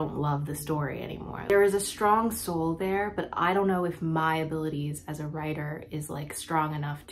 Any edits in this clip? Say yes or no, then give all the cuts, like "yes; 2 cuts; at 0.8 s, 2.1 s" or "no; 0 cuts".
yes; 1 cut; at 1.3 s